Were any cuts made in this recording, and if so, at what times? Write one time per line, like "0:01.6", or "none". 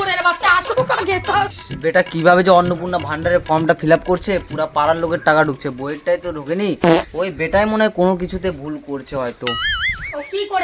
0:01.6